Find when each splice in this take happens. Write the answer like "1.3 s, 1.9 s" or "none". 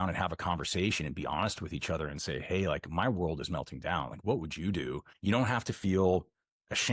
5.1 s